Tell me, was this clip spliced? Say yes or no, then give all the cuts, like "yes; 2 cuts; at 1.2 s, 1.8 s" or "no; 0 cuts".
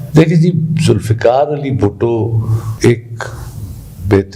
yes; 1 cut; at 2.6 s